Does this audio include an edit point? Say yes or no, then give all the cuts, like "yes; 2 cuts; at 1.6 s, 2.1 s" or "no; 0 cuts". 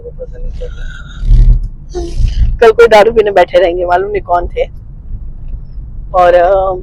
no; 0 cuts